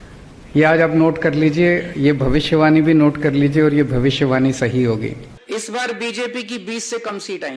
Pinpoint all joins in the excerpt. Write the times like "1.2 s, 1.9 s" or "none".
5.3 s